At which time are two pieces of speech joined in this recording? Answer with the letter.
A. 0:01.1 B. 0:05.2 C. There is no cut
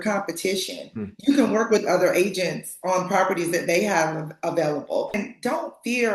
B